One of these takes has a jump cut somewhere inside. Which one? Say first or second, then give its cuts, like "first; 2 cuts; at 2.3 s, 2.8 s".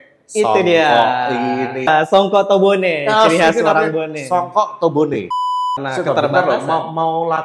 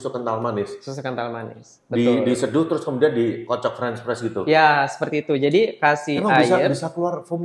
first; 2 cuts; at 1.9 s, 5.4 s